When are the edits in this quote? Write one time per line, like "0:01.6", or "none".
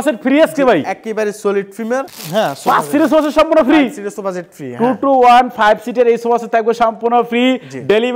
none